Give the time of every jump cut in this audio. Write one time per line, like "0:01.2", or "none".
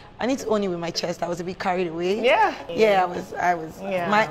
0:02.6

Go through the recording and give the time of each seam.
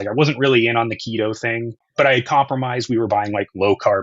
0:01.8

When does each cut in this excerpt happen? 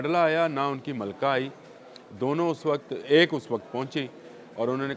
none

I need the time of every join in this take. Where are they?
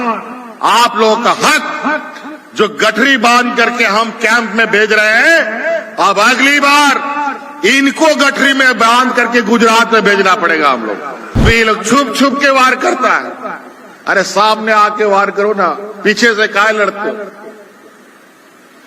0:11.4

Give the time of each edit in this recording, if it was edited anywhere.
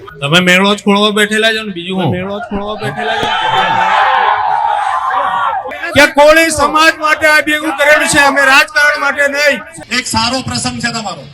0:05.7
0:09.7

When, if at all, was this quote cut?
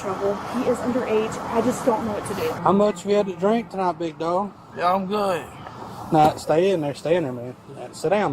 0:02.6

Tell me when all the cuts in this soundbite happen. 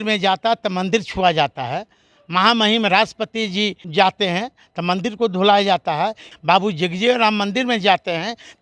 0:03.8
0:06.3

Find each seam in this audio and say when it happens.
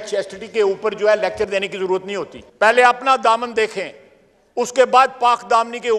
0:02.4

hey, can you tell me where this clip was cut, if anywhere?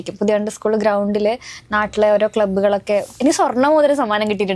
0:03.1

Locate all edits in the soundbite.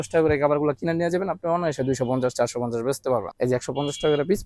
0:03.3

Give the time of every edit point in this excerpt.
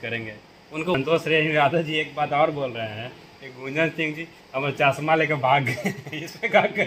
0:00.9

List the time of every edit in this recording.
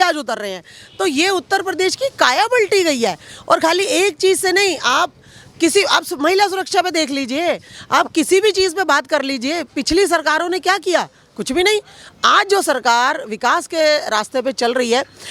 none

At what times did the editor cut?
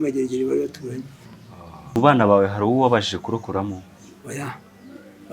0:02.0

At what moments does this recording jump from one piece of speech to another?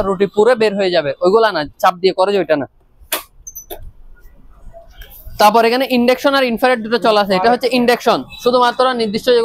none

